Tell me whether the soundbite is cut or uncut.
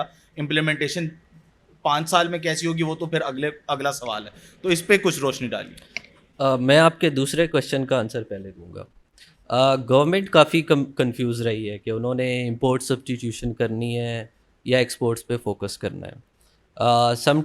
uncut